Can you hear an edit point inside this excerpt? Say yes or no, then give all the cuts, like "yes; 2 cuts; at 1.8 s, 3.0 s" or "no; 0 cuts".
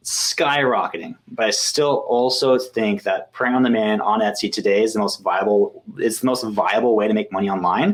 no; 0 cuts